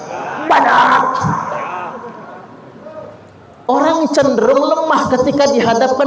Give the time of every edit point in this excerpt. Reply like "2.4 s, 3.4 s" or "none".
none

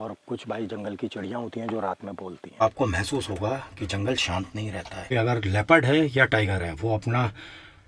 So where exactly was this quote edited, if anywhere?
2.6 s, 5.1 s

